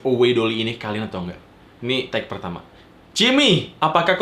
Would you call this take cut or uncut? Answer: uncut